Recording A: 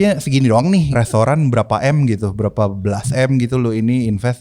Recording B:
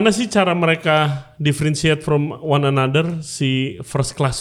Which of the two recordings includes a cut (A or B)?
A